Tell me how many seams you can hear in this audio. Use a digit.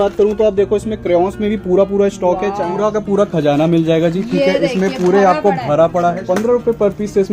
2